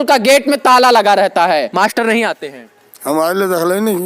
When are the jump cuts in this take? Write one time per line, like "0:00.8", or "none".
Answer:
0:01.7